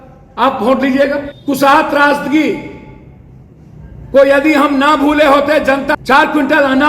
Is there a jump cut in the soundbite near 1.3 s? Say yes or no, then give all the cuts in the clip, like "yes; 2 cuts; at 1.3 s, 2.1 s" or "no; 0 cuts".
yes; 2 cuts; at 1.3 s, 5.9 s